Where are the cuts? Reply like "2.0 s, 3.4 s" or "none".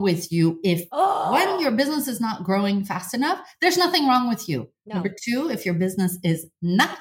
1.3 s